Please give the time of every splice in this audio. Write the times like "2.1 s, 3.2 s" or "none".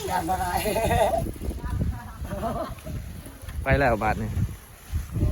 1.6 s

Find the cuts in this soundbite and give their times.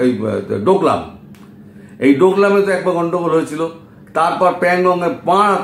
none

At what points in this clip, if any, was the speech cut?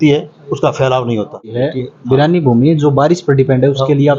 1.6 s

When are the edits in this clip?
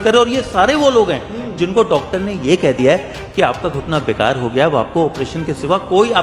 none

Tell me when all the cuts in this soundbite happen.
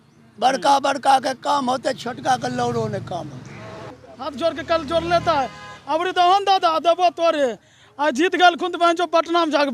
3.9 s

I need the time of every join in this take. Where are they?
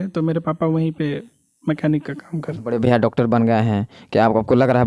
2.3 s

